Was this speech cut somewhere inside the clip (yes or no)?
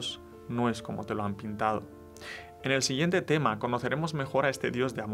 no